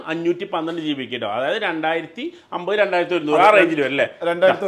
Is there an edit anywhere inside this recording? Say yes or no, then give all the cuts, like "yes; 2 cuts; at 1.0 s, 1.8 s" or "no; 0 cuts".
no; 0 cuts